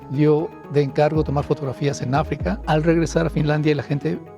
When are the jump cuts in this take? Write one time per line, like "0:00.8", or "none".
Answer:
0:02.6

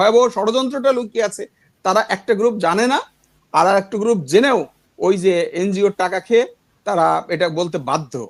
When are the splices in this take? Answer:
none

